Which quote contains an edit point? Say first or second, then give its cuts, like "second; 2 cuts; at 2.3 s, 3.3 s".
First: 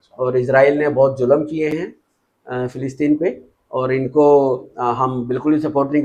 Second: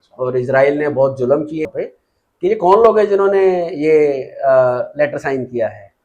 second; 1 cut; at 1.7 s